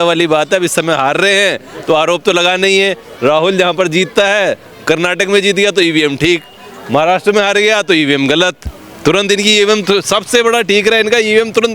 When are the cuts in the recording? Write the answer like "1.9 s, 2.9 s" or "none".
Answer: none